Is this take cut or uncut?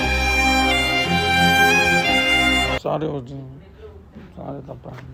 uncut